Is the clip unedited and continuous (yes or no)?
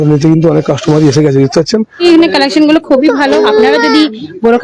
no